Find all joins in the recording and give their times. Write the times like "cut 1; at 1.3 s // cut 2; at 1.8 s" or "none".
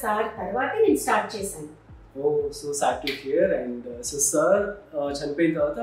none